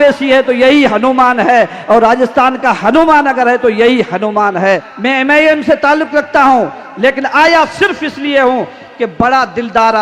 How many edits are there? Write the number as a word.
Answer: one